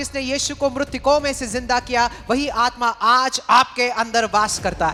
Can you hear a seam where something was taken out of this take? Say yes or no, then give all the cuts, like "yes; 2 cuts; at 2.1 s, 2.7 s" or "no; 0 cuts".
no; 0 cuts